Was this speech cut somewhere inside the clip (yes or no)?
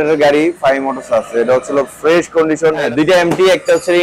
yes